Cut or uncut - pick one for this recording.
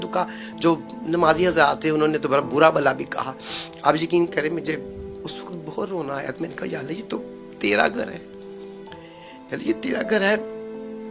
uncut